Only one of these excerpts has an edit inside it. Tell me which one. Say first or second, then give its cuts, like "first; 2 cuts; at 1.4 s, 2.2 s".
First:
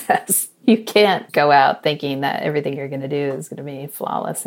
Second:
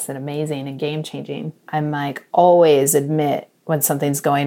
second; 1 cut; at 1.5 s